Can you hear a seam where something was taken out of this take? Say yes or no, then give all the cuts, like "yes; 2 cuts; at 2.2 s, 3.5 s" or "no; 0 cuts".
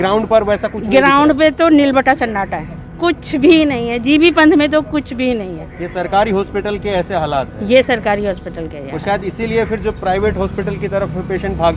no; 0 cuts